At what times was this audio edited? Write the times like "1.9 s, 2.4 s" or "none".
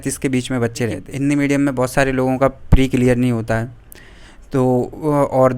1.0 s